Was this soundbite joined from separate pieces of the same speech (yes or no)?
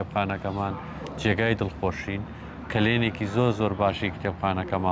no